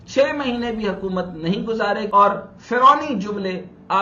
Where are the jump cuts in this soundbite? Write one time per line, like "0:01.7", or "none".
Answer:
0:02.1